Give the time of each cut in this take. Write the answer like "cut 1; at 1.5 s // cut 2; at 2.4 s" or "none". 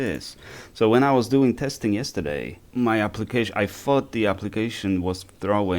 cut 1; at 2.6 s